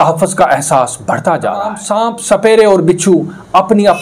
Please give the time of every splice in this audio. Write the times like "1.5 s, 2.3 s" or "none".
1.8 s